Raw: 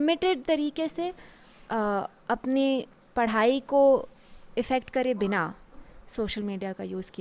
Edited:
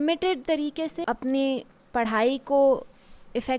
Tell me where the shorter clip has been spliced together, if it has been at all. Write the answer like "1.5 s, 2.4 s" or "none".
1.0 s

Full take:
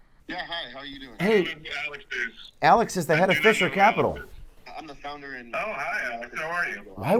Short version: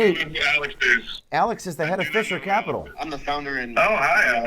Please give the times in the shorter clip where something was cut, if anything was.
3.0 s

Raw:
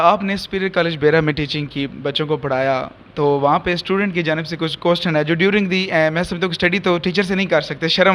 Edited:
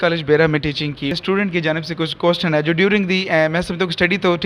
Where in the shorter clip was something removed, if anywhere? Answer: 1.2 s

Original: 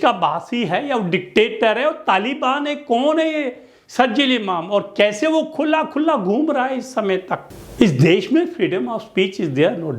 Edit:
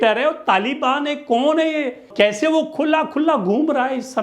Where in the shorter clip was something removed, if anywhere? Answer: 2.1 s

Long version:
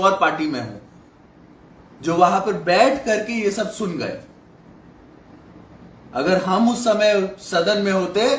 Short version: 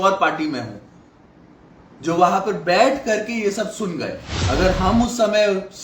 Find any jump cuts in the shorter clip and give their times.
4.3 s

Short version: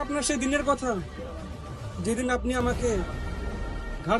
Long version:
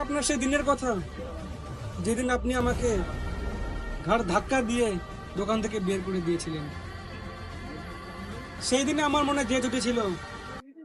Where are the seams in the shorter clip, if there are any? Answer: none

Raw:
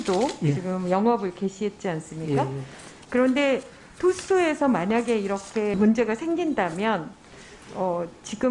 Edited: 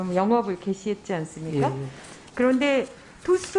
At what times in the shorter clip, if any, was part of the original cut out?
none

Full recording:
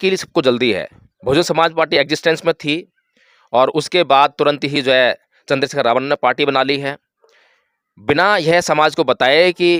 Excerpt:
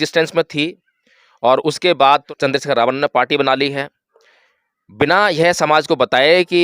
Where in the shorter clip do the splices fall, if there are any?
2.2 s

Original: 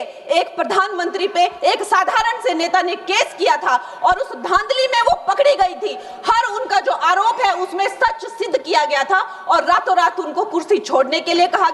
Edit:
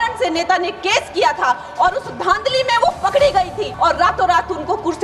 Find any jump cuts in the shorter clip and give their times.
3.7 s

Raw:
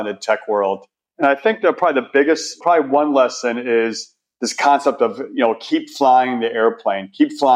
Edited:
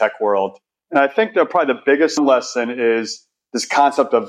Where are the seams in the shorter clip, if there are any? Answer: 2.2 s

